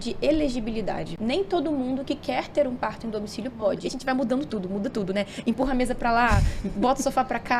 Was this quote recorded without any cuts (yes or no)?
no